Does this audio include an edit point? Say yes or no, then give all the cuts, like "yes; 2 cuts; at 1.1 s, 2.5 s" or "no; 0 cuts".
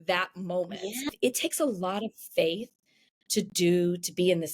yes; 1 cut; at 1.1 s